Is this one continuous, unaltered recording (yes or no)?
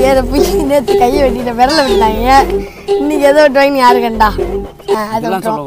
yes